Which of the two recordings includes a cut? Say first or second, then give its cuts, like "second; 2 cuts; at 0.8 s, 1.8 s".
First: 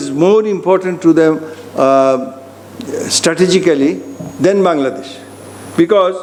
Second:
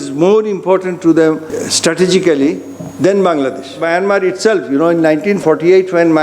second; 3 cuts; at 1.5 s, 3.8 s, 5.4 s